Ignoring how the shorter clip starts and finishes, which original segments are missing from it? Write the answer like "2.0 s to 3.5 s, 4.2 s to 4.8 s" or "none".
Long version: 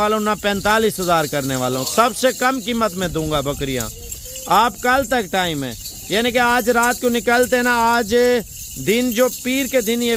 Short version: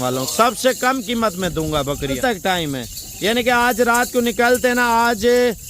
3.8 s to 5.1 s